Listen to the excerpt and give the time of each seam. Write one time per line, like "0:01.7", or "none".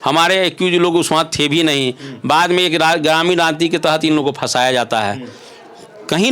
none